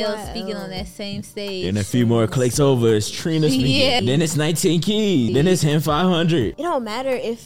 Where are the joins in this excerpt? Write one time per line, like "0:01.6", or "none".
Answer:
0:04.0
0:05.3
0:06.5